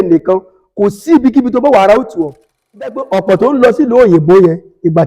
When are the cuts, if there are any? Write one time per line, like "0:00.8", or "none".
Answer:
0:02.7